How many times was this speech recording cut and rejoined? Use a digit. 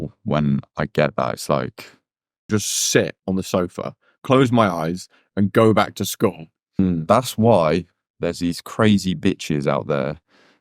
2